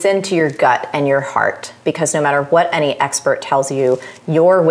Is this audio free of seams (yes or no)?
yes